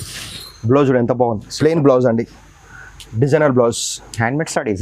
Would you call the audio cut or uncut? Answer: uncut